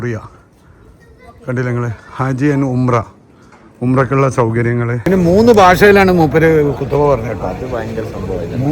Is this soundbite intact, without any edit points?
no; 1 cut; at 5.0 s

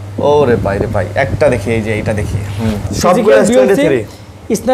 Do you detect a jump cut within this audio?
yes; 1 cut; at 2.9 s

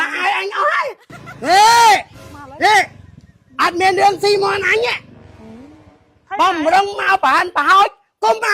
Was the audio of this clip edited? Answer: yes; 1 cut; at 1.1 s

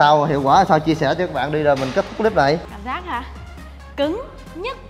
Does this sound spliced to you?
no; 0 cuts

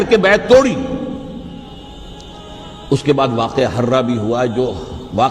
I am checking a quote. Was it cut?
yes; 1 cut; at 1.7 s

